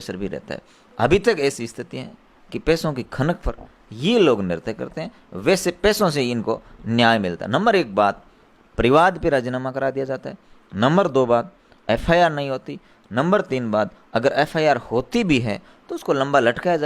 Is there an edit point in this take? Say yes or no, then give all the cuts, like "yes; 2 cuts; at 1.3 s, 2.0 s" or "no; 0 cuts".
no; 0 cuts